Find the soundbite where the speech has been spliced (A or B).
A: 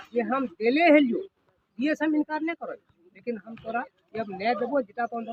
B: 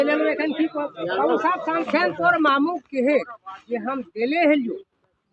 B